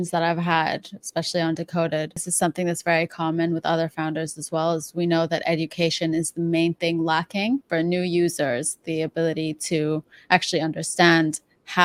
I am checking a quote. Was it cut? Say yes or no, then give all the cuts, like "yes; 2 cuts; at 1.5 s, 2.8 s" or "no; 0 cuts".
no; 0 cuts